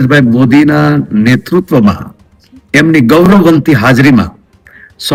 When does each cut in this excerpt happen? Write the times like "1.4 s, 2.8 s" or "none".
none